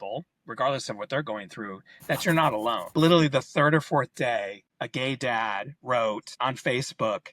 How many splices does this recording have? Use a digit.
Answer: 1